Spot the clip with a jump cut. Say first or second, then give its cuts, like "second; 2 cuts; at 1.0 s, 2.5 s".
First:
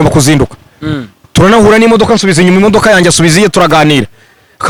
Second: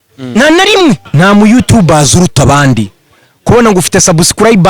second; 1 cut; at 1.1 s